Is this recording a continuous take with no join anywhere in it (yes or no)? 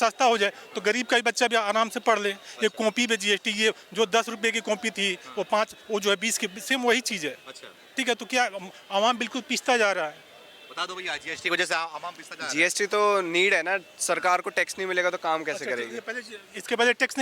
yes